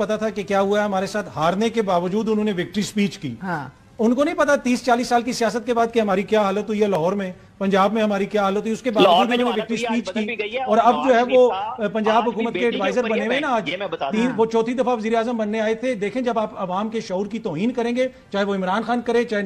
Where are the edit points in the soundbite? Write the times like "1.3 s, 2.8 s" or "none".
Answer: none